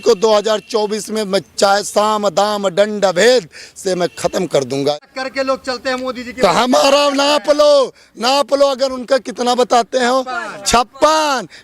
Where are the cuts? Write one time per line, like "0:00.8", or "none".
0:04.9